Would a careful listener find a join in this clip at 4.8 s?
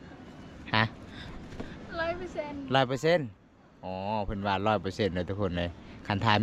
no; 0 cuts

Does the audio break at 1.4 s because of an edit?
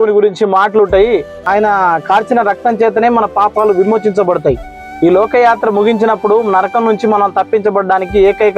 yes; 1 cut; at 1.4 s

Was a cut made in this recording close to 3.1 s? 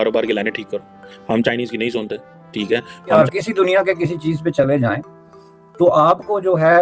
yes; 1 cut; at 3.1 s

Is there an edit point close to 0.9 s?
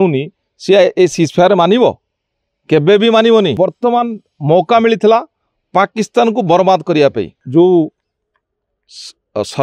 no; 2 cuts; at 3.6 s, 7.3 s

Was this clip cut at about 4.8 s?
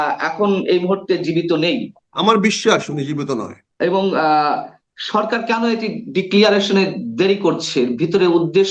no; 2 cuts; at 2.0 s, 3.6 s

